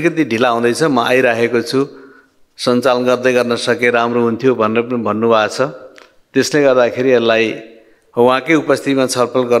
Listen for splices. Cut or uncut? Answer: uncut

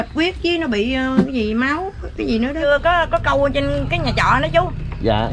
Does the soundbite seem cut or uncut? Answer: cut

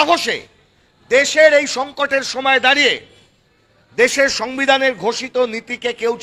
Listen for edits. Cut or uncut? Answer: uncut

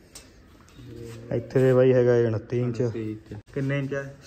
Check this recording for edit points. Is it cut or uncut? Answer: cut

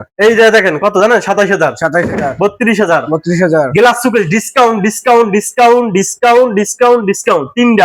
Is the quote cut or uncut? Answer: uncut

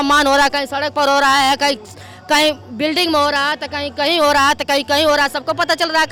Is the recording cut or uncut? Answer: uncut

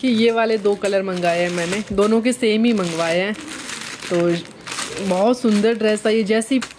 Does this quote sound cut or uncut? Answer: uncut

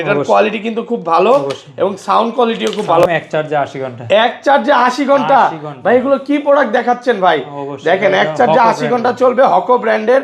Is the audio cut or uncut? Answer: cut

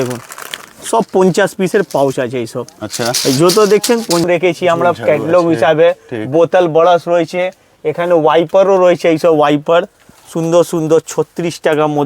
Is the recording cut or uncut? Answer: cut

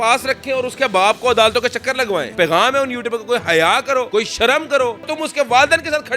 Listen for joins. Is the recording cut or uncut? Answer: cut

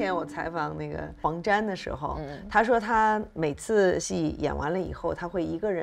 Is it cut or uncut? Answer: cut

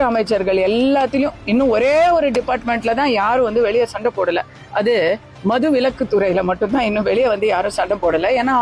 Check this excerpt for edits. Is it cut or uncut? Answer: uncut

